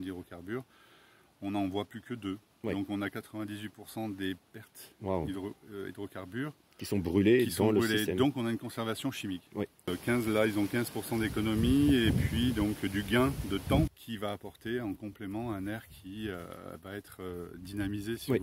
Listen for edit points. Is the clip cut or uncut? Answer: cut